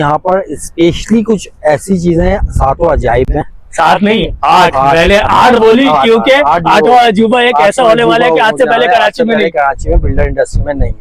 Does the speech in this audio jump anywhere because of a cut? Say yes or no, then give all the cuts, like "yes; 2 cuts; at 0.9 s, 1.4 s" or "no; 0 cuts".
no; 0 cuts